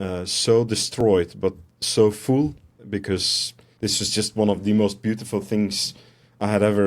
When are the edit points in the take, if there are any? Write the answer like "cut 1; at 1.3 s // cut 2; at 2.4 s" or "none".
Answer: cut 1; at 3.1 s

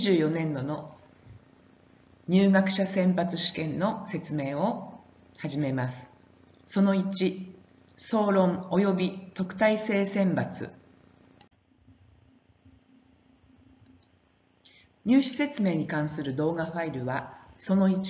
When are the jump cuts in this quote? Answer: cut 1; at 14.6 s

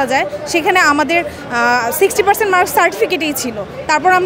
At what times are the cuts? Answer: none

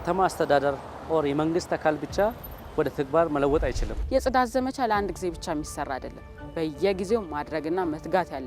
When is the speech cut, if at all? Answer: cut 1; at 3.9 s

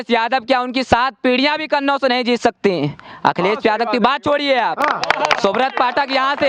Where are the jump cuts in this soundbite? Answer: none

